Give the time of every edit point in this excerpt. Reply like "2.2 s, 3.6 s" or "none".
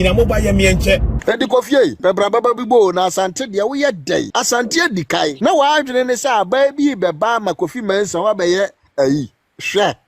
1.1 s, 2.0 s, 4.3 s, 5.4 s